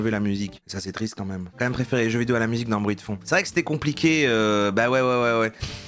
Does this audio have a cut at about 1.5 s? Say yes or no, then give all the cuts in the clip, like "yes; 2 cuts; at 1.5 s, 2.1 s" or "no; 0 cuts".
yes; 1 cut; at 1.5 s